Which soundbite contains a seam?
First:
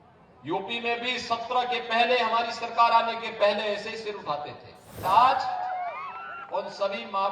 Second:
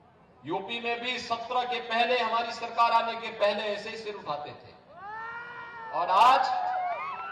first; 1 cut; at 5.0 s

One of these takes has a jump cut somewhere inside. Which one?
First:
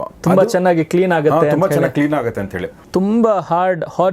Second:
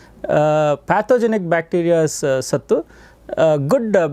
first; 1 cut; at 2.8 s

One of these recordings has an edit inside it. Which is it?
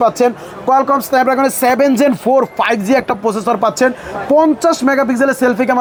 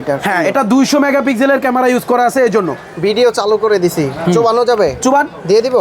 second; 1 cut; at 2.9 s

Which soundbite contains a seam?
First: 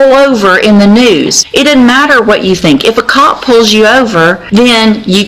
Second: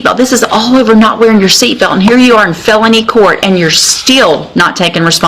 first; 2 cuts; at 1.4 s, 4.4 s

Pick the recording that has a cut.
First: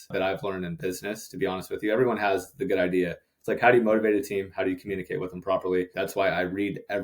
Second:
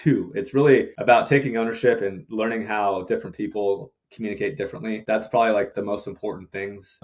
first; 1 cut; at 5.9 s

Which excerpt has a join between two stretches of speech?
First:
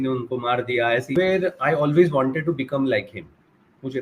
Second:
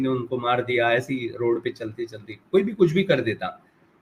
first; 1 cut; at 1.1 s

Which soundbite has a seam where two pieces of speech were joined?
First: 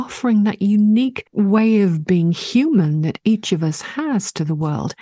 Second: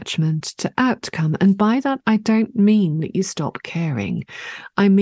first; 1 cut; at 1.2 s

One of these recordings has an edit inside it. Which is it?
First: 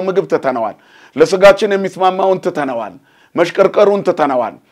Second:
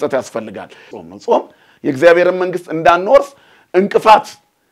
second; 1 cut; at 0.9 s

